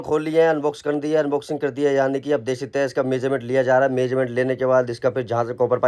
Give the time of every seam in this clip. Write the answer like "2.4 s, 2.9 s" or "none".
none